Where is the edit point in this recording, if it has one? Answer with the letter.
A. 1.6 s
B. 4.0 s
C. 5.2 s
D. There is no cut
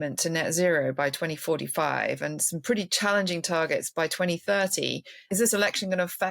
C